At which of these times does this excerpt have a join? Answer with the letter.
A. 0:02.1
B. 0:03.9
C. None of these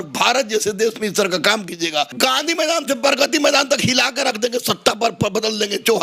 A